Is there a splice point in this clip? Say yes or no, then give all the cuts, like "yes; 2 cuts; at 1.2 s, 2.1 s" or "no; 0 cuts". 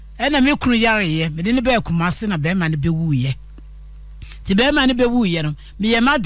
no; 0 cuts